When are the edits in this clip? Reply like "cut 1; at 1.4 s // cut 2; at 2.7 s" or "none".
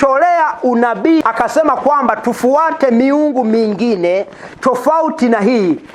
cut 1; at 1.2 s